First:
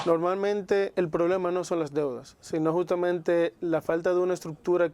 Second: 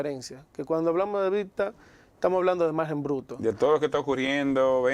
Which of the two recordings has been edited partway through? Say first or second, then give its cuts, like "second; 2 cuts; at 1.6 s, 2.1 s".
first; 1 cut; at 0.9 s